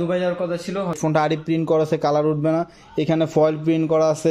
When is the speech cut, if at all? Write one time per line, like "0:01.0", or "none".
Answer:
0:01.0